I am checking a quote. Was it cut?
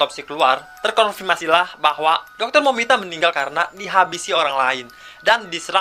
no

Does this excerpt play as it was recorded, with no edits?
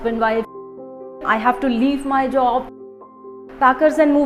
no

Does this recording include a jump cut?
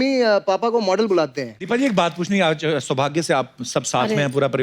yes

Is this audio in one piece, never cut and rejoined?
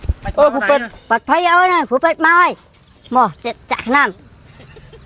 no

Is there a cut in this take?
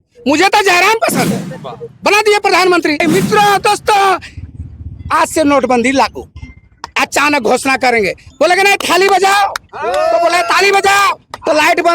yes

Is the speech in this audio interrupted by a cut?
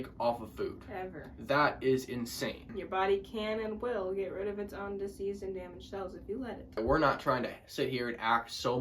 yes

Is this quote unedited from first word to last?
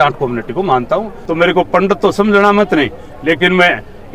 no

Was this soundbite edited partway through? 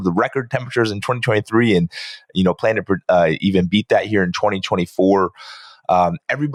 no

